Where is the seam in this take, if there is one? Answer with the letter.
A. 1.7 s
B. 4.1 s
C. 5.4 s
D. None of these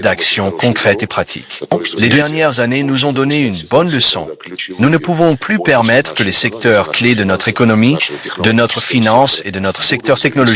A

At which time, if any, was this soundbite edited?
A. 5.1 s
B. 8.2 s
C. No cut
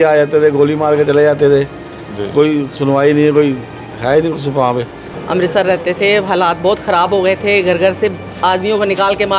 A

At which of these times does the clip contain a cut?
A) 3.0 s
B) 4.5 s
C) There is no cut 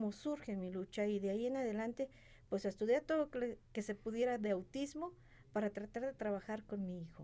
C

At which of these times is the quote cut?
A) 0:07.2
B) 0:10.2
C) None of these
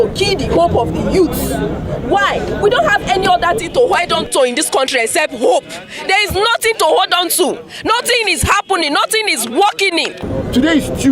B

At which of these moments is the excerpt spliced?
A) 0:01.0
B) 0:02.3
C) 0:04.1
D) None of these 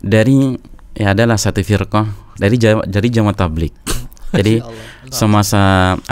B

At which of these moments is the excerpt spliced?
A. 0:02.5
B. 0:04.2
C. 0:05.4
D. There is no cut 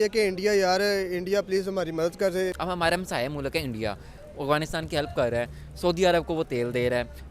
A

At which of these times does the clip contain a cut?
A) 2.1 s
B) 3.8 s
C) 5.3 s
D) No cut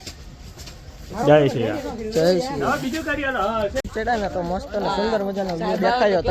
D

